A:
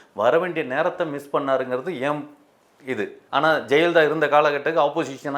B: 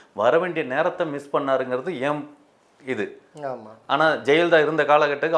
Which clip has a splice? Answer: A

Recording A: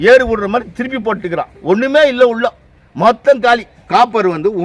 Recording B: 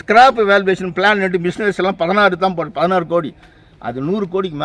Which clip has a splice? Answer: A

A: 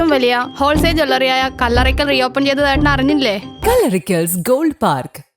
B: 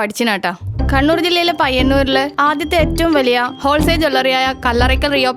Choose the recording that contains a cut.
A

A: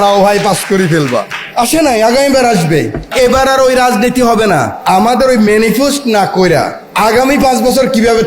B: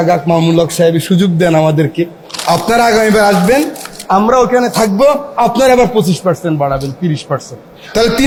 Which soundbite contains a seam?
A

